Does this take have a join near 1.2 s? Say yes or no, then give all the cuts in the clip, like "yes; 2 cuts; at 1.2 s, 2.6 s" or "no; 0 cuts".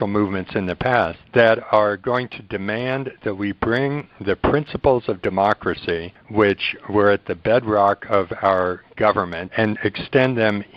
yes; 3 cuts; at 1.2 s, 6.1 s, 9.4 s